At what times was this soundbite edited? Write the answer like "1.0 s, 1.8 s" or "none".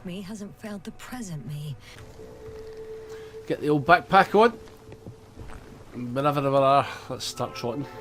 1.9 s